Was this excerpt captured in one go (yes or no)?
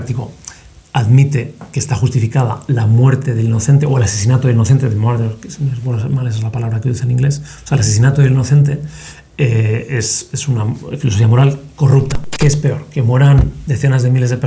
no